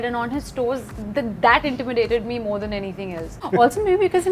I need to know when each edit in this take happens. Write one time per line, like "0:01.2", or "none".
0:01.0
0:03.4